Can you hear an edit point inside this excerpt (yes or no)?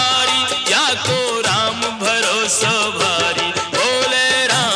no